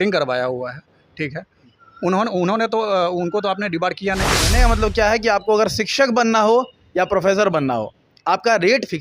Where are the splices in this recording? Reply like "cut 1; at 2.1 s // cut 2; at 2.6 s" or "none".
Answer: cut 1; at 4.5 s